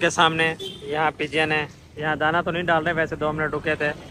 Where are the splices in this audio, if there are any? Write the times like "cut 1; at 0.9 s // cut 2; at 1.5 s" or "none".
none